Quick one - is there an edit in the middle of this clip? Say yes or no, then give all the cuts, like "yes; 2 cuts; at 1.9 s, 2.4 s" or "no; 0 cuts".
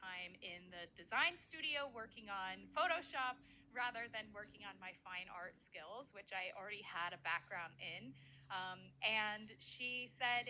no; 0 cuts